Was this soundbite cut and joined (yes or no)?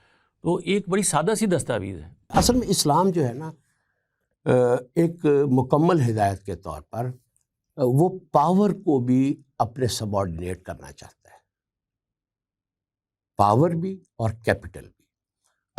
yes